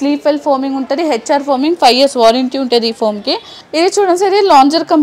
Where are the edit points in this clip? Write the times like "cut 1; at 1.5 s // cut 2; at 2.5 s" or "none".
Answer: cut 1; at 3.6 s